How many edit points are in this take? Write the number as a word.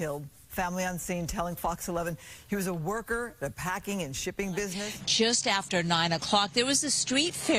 one